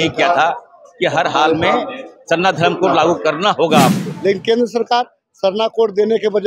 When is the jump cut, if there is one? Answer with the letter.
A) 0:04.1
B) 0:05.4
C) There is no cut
A